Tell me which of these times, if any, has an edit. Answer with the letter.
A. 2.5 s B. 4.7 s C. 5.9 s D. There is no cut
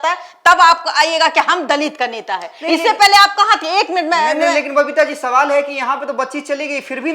D